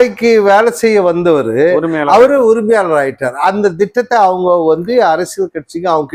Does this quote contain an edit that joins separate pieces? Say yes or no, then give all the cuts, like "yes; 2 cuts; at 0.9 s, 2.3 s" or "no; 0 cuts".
no; 0 cuts